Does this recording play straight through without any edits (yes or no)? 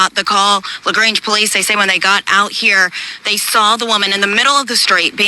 no